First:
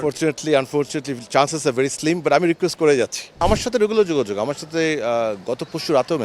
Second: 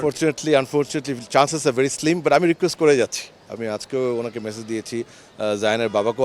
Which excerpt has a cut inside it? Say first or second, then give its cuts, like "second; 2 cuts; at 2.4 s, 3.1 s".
first; 1 cut; at 3.4 s